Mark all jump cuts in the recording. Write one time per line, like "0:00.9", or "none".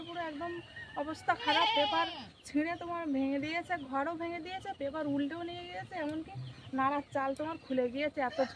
none